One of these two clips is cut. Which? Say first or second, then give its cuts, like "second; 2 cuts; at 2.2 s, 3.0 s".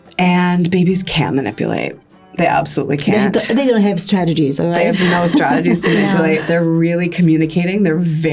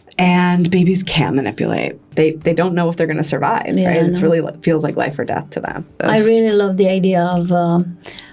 second; 2 cuts; at 2.1 s, 5.9 s